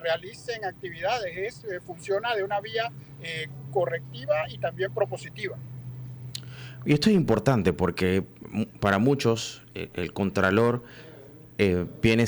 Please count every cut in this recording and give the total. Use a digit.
0